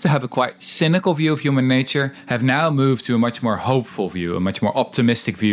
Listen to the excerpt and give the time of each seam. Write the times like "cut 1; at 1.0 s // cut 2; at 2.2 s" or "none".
none